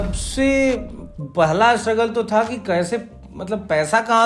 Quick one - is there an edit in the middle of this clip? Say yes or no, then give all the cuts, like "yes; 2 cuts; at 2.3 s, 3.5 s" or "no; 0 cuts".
no; 0 cuts